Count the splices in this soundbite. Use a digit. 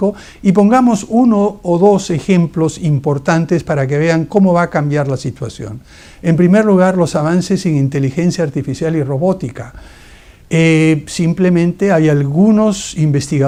0